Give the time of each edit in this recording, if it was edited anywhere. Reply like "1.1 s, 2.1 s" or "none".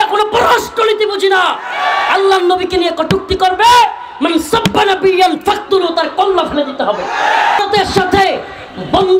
7.6 s